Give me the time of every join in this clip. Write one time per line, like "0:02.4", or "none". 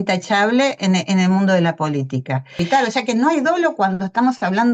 0:02.6